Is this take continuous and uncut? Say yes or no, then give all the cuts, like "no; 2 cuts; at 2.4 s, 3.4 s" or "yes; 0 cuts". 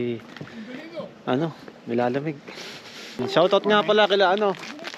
no; 1 cut; at 3.2 s